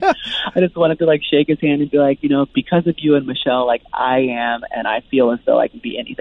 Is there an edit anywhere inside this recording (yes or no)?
no